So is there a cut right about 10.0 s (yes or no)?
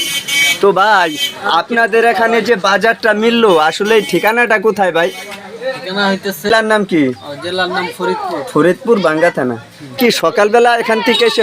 yes